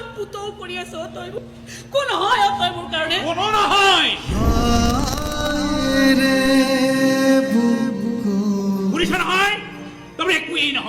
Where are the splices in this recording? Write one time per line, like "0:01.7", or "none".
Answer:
0:01.4

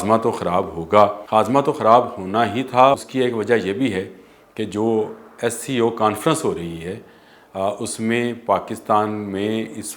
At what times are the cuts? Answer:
0:01.2
0:03.0

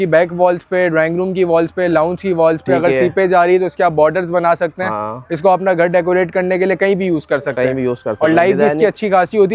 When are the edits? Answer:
none

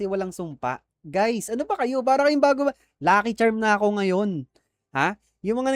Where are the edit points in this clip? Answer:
none

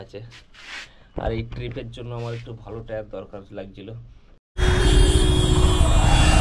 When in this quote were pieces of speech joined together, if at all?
0:04.5

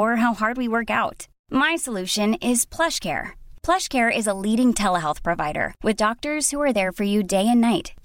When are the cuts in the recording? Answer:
none

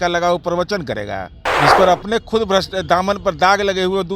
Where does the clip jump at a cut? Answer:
0:01.4

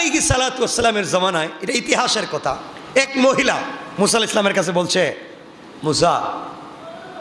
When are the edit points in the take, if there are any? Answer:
0:02.7
0:03.8

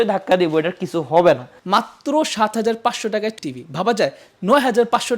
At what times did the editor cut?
0:01.5
0:03.4

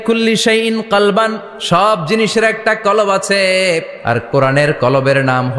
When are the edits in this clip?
0:01.5
0:03.9

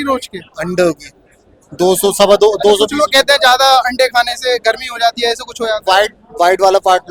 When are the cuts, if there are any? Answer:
none

